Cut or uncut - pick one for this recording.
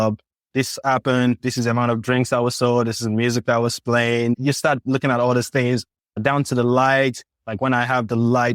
uncut